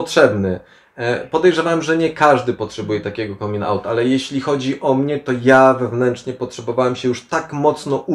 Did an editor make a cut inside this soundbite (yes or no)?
no